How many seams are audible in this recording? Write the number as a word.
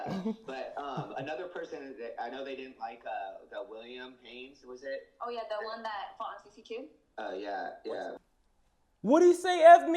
one